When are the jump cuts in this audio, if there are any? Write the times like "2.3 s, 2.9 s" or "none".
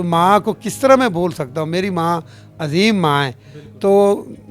none